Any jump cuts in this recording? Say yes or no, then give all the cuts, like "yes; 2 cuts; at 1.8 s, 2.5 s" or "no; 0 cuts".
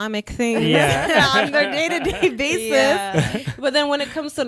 no; 0 cuts